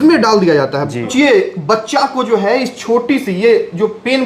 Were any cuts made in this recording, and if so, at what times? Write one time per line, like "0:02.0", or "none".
0:01.1